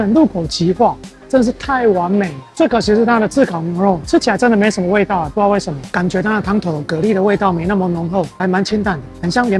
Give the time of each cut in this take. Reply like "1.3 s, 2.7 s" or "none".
5.8 s